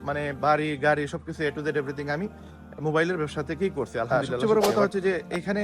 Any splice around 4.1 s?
yes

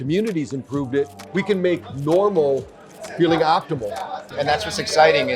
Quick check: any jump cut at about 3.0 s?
no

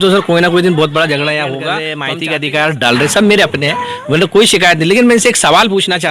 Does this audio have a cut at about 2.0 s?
yes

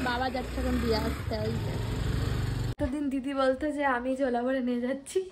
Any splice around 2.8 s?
yes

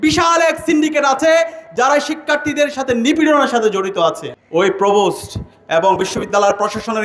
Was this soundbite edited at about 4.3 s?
yes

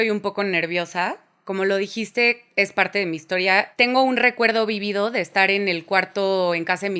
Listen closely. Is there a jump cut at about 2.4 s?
no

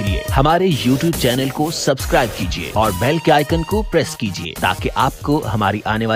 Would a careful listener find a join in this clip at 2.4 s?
no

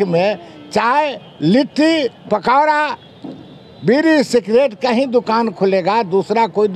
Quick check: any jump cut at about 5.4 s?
no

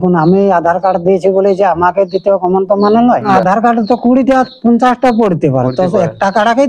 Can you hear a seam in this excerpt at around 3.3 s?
yes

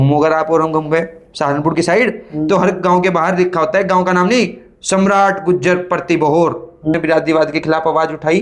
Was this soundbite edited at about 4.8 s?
no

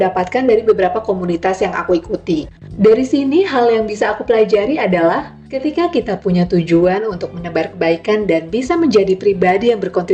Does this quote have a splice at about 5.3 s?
no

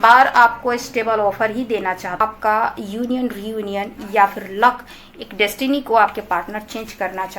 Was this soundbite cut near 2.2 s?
yes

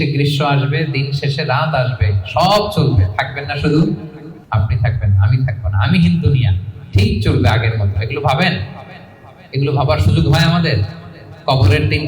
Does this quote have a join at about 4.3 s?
yes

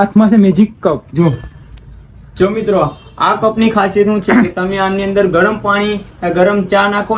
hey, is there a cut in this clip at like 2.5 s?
no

